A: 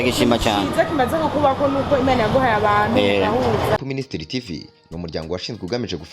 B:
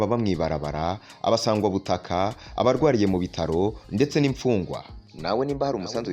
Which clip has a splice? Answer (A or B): A